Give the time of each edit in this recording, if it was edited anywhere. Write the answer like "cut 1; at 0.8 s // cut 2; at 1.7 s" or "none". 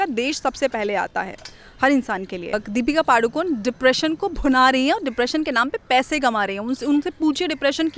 cut 1; at 2.6 s